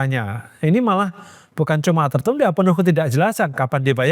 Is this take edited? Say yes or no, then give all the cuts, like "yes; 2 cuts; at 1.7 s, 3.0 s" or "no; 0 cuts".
no; 0 cuts